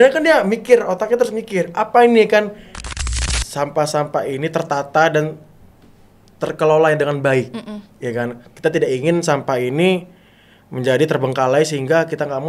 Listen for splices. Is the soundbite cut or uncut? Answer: cut